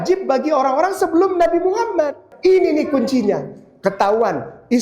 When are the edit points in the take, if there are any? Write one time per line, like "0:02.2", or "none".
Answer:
0:02.3